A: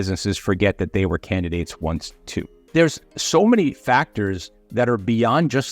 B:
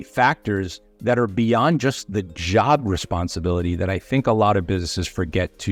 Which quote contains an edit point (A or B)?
A